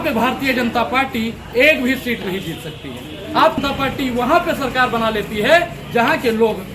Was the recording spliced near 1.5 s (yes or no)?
no